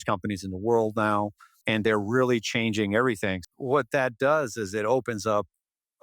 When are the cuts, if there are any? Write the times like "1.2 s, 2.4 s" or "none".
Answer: 1.6 s, 3.4 s